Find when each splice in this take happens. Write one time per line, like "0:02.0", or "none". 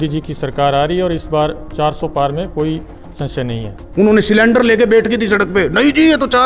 0:03.8